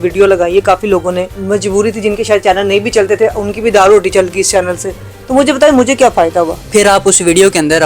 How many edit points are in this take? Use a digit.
2